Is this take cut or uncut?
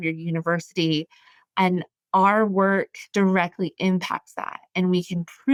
uncut